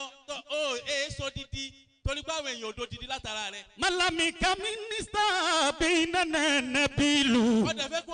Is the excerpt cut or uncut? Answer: uncut